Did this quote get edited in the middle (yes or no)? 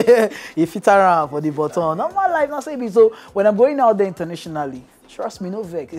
no